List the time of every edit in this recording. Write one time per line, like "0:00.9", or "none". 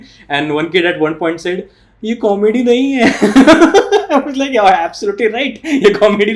none

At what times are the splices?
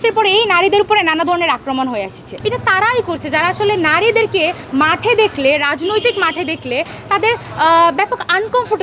0:02.3

